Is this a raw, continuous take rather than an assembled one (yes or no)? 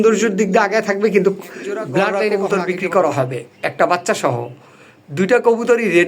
no